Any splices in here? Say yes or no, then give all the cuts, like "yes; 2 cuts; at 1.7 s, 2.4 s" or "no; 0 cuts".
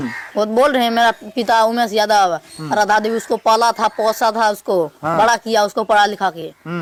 no; 0 cuts